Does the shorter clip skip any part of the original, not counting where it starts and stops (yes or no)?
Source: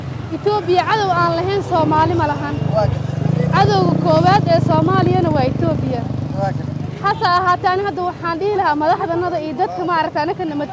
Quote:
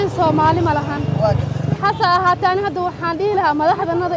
yes